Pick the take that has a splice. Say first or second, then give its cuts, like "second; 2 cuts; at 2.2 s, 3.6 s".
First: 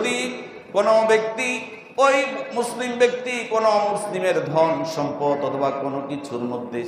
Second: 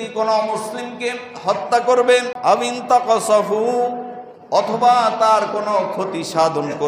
second; 1 cut; at 2.3 s